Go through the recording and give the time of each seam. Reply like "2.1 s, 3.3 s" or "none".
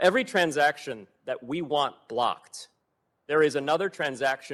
none

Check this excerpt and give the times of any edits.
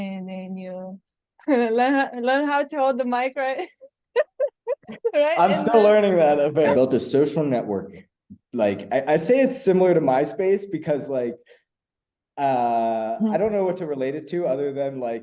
6.7 s

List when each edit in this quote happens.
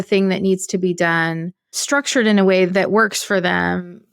1.8 s

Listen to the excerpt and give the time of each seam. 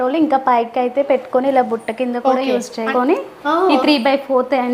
2.9 s

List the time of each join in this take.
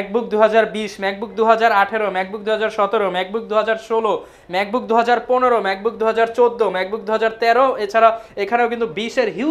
none

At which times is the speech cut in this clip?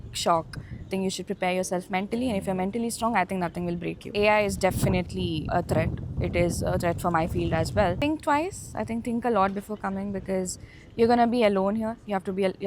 0.9 s, 4.1 s, 5.4 s, 8.0 s

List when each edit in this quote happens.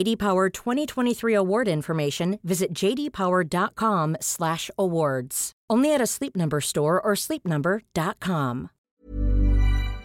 9.0 s

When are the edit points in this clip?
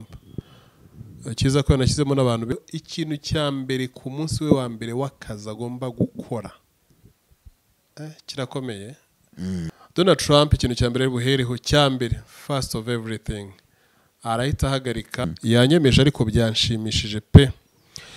2.5 s, 9.8 s

